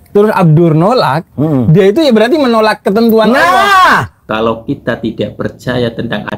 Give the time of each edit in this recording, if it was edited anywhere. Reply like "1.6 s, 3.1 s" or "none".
4.2 s